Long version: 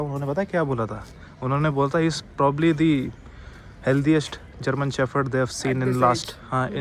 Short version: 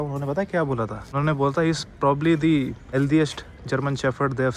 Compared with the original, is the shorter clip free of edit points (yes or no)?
no